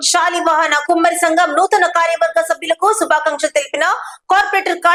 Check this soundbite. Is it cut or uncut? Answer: uncut